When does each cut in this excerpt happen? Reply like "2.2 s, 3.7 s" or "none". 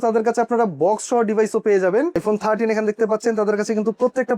2.2 s